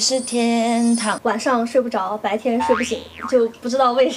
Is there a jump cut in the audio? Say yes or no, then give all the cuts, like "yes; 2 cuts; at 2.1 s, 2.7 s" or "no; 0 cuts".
yes; 1 cut; at 1.2 s